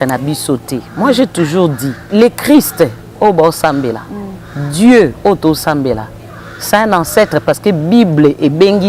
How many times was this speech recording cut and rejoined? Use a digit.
1